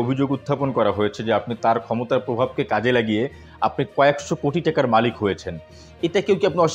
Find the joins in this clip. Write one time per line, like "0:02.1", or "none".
none